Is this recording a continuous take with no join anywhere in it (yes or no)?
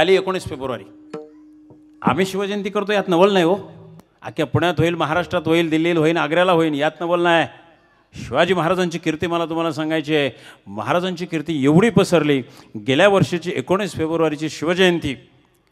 no